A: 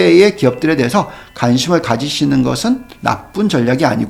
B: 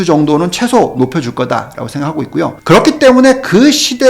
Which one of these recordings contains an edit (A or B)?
B